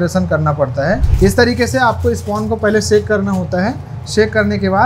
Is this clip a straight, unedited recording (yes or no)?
no